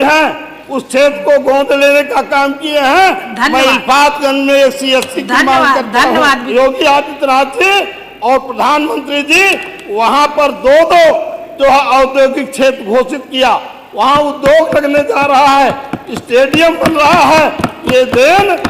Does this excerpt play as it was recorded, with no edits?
no; 1 cut; at 6.5 s

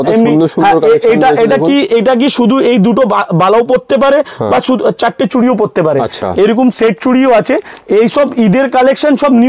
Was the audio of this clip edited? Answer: no; 0 cuts

